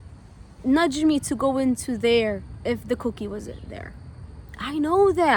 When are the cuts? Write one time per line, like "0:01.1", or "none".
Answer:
none